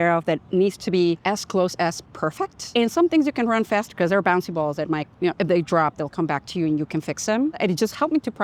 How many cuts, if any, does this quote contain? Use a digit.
3